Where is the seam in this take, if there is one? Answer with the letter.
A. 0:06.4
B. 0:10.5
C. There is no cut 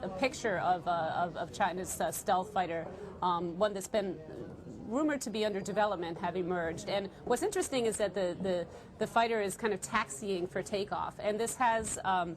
A